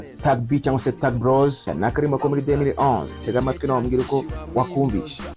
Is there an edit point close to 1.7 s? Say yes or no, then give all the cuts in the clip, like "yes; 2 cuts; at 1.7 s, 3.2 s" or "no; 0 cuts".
yes; 1 cut; at 1.7 s